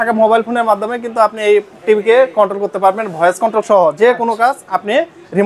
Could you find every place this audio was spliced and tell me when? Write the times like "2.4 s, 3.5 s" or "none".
none